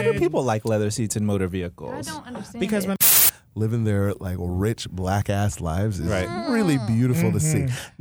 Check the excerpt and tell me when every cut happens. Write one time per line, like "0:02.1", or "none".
0:03.0